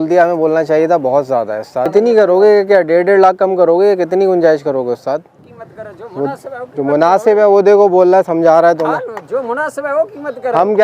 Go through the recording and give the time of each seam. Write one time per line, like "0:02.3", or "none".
0:01.9
0:05.3

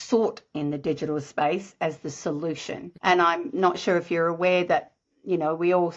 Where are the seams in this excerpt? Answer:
0:02.9

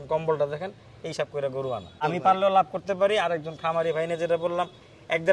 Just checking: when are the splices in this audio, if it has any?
0:02.0

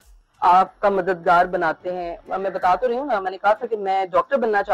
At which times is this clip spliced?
0:02.1

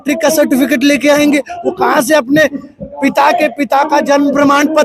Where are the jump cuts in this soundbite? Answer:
none

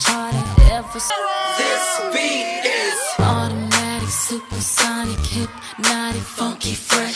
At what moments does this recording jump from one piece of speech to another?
0:01.1

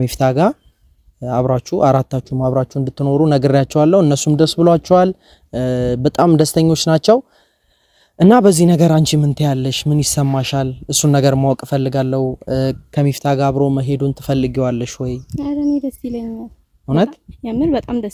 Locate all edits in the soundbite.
none

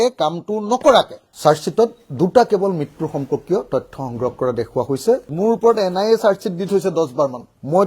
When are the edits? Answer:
0:05.3

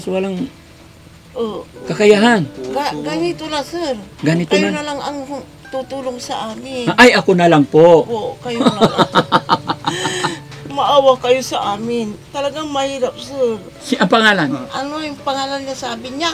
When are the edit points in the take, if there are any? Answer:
0:13.7

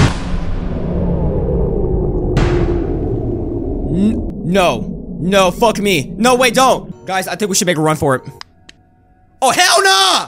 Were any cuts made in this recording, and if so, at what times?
0:04.3
0:06.9

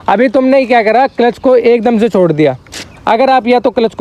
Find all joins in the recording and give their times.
none

